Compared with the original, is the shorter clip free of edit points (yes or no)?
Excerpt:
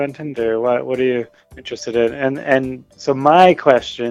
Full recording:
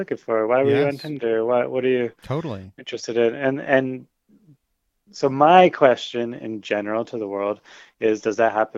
no